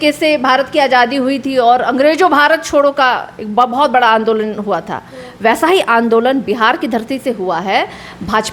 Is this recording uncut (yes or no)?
yes